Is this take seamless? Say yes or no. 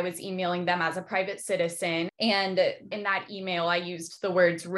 no